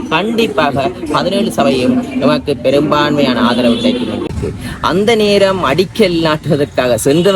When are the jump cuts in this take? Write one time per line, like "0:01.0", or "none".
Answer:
0:04.3